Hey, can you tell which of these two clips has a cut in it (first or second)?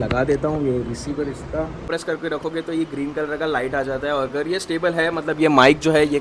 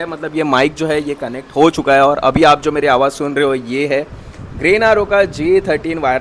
first